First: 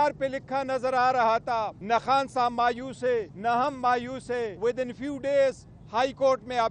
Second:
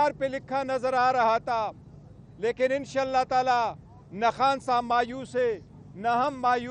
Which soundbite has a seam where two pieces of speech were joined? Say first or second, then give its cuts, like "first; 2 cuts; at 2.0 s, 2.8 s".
first; 3 cuts; at 1.8 s, 3.3 s, 4.5 s